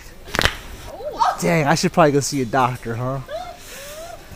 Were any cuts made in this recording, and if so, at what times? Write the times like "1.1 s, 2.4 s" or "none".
1.4 s